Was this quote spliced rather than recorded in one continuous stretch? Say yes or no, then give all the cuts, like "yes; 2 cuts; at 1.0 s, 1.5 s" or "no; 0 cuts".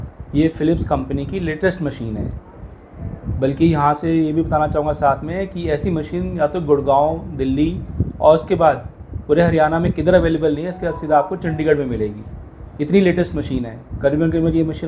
no; 0 cuts